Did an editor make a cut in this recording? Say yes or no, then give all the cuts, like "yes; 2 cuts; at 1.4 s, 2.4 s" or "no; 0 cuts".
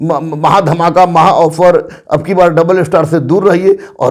no; 0 cuts